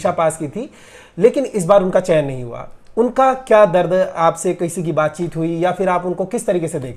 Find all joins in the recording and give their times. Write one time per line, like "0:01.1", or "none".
none

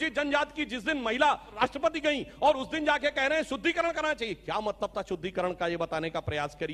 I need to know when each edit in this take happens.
none

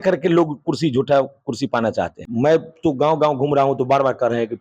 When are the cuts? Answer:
0:02.2

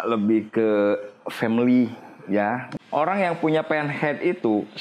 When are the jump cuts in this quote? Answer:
0:02.7

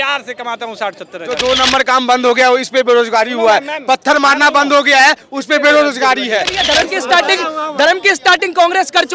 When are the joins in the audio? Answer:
0:01.2
0:06.6

